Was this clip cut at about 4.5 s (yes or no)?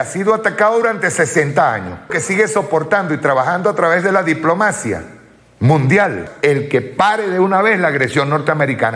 no